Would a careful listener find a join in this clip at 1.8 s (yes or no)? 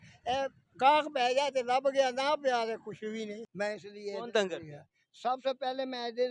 no